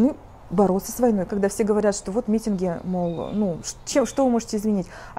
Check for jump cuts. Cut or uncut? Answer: cut